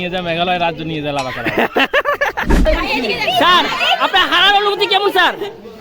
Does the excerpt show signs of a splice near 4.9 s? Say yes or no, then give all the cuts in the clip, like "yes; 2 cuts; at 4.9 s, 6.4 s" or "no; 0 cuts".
no; 1 cut; at 2.7 s